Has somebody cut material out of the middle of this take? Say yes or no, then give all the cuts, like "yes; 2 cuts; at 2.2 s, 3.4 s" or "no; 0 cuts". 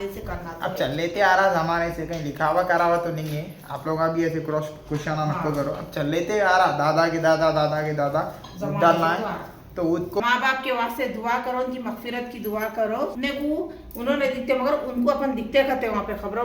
yes; 2 cuts; at 10.2 s, 13.1 s